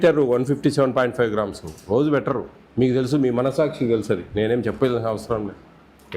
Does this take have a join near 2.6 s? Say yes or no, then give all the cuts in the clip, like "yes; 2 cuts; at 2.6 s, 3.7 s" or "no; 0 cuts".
yes; 1 cut; at 2.6 s